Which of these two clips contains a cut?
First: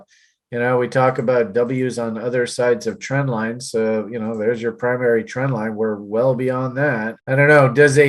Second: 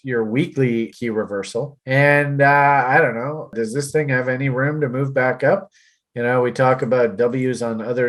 second; 2 cuts; at 0.9 s, 3.5 s

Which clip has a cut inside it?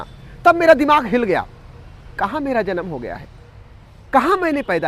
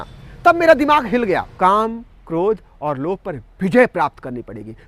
second; 1 cut; at 1.5 s

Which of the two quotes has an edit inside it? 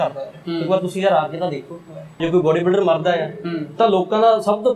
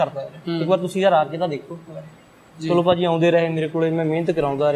first; 1 cut; at 2.2 s

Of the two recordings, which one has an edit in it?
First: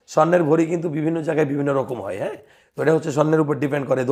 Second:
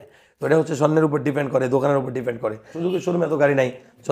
second; 1 cut; at 2.7 s

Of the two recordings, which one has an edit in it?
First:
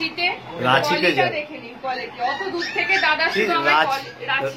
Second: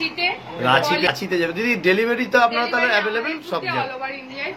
second; 1 cut; at 1.1 s

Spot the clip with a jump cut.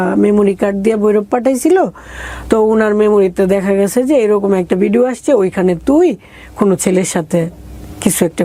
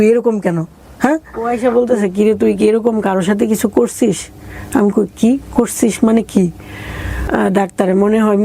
second; 2 cuts; at 1.5 s, 7.2 s

